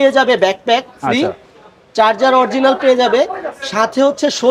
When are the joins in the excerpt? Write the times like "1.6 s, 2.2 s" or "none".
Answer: none